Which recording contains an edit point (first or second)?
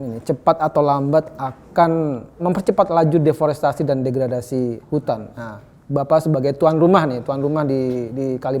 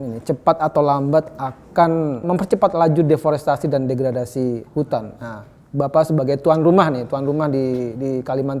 second